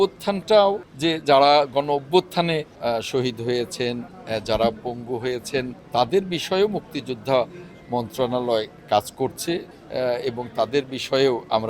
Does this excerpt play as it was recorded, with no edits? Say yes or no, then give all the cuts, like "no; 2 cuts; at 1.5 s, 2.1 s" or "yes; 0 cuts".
no; 4 cuts; at 0.9 s, 2.7 s, 5.8 s, 9.8 s